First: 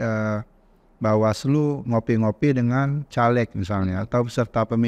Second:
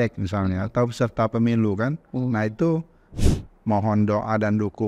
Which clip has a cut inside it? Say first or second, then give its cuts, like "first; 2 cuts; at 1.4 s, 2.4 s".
second; 1 cut; at 3.1 s